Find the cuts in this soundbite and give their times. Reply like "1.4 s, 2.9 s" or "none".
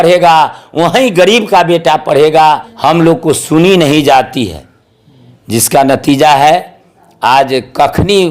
2.7 s